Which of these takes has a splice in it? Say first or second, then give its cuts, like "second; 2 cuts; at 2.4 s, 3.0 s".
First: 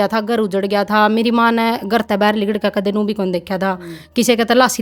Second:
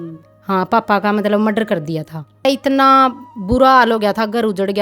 second; 1 cut; at 2.5 s